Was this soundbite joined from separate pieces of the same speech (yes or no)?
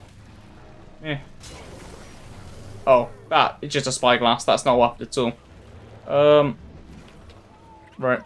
yes